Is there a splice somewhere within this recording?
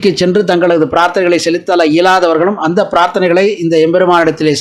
no; 0 cuts

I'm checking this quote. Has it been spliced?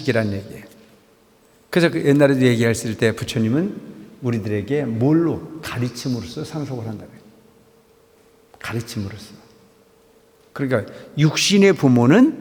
no; 0 cuts

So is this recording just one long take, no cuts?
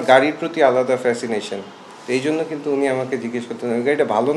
yes; 0 cuts

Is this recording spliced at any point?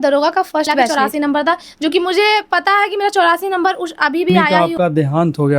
yes; 2 cuts; at 0.9 s, 4.5 s

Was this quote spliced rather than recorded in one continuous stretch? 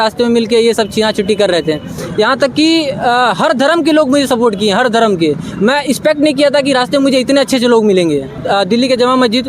yes; 2 cuts; at 2.0 s, 8.4 s

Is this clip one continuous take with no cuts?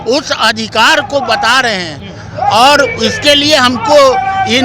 yes; 0 cuts

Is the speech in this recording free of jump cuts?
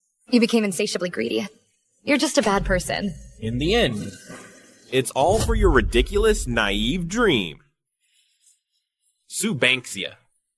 yes; 0 cuts

